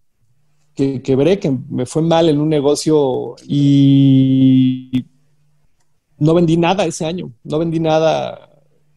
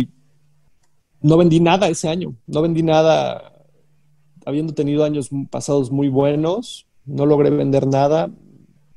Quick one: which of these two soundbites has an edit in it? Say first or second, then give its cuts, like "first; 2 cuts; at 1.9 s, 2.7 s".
first; 1 cut; at 3.3 s